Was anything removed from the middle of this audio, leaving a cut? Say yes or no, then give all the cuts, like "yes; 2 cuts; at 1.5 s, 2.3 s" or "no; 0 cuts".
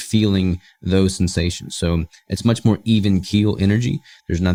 no; 0 cuts